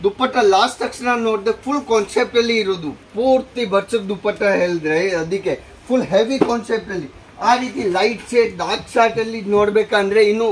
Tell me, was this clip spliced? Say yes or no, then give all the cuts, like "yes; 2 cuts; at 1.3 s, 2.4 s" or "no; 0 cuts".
no; 0 cuts